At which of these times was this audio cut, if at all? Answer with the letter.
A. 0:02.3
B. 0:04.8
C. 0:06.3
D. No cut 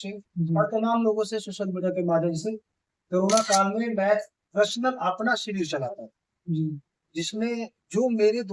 D